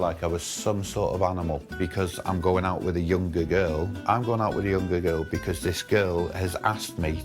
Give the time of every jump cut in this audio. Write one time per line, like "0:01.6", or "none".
0:01.7
0:03.9